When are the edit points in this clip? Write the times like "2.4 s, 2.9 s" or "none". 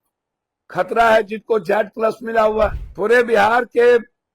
2.9 s